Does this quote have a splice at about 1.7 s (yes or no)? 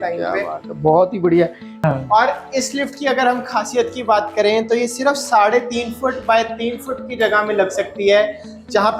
yes